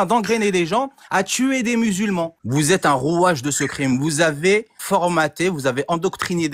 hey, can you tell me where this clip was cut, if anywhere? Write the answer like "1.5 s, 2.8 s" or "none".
2.4 s, 4.8 s